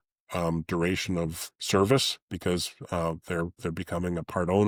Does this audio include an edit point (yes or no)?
no